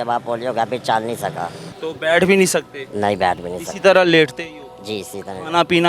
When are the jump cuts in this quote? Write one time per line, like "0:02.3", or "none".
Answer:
0:01.7